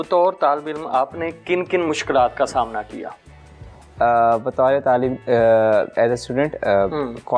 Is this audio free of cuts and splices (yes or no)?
yes